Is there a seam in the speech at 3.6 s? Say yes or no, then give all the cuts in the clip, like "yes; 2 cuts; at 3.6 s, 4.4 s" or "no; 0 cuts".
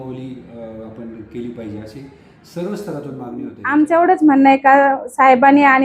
yes; 1 cut; at 3.6 s